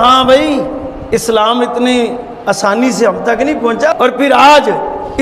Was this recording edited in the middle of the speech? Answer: yes; 1 cut; at 3.9 s

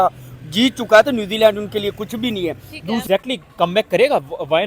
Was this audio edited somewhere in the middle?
yes; 1 cut; at 3.0 s

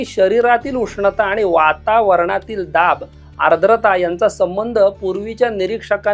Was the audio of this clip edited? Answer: no; 0 cuts

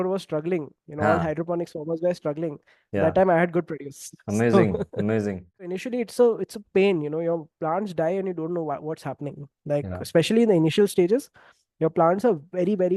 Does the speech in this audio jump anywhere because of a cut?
yes; 1 cut; at 5.7 s

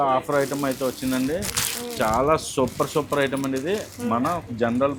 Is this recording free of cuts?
yes; 0 cuts

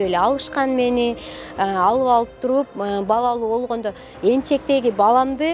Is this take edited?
yes; 1 cut; at 4.1 s

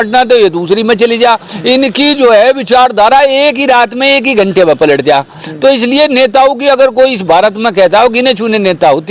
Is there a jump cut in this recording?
no; 0 cuts

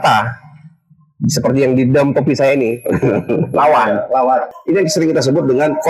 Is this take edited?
yes; 1 cut; at 4.5 s

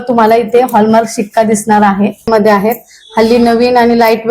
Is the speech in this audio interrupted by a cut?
yes; 1 cut; at 2.3 s

